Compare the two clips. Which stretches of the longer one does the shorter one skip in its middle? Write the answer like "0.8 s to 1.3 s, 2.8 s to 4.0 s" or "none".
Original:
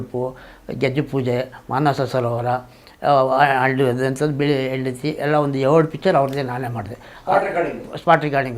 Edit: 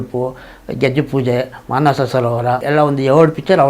2.6 s to 5.2 s